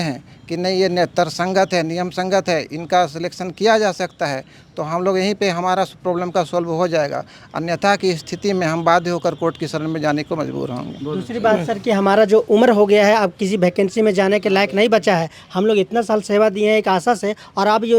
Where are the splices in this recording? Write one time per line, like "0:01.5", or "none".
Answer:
none